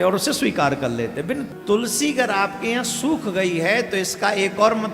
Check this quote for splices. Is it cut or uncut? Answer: cut